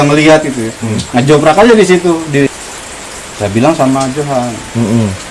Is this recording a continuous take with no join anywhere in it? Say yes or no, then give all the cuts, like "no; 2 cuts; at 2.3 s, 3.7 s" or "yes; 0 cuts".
no; 1 cut; at 2.5 s